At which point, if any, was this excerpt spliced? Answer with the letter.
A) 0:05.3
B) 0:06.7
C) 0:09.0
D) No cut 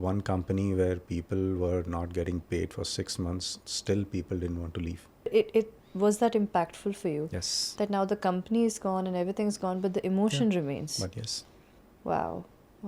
A